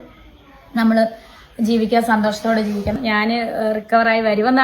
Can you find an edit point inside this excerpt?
yes; 1 cut; at 2.9 s

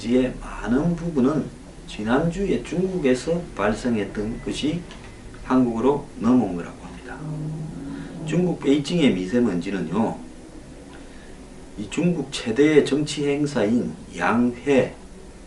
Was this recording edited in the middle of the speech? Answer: yes; 1 cut; at 9.1 s

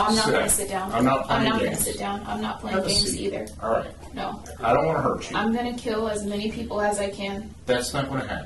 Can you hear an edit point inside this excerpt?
no; 0 cuts

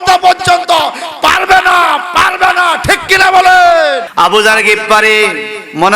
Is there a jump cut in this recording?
yes; 1 cut; at 4.1 s

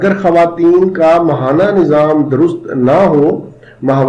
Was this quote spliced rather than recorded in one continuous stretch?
no; 0 cuts

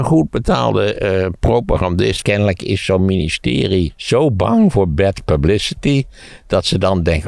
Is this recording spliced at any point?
yes; 2 cuts; at 2.2 s, 4.0 s

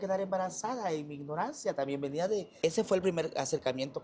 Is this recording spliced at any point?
yes; 1 cut; at 2.5 s

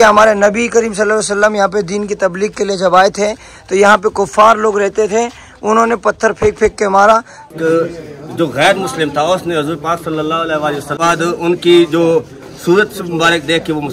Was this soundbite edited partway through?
yes; 2 cuts; at 7.5 s, 11.0 s

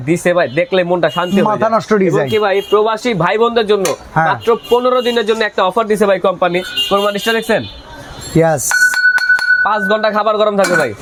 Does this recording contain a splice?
no; 0 cuts

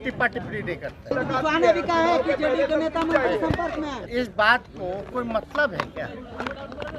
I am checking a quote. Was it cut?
yes; 2 cuts; at 1.1 s, 4.0 s

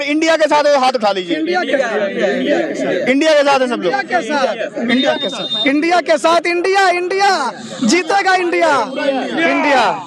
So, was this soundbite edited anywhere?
no; 0 cuts

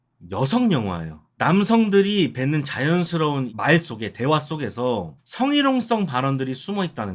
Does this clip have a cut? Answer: no; 0 cuts

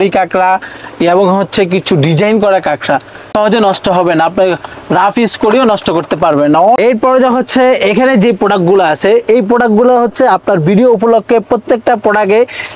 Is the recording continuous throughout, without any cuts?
yes; 0 cuts

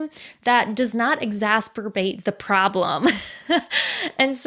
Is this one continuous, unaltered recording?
yes; 0 cuts

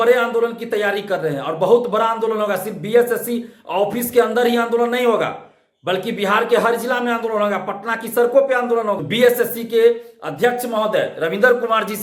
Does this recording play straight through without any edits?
no; 1 cut; at 9.0 s

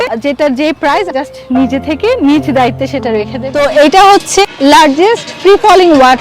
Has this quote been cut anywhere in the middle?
yes; 1 cut; at 3.4 s

